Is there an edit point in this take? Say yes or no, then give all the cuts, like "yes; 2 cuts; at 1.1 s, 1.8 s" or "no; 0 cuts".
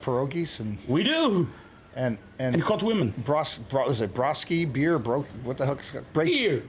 no; 0 cuts